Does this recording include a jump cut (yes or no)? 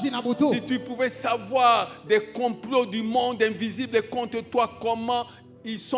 no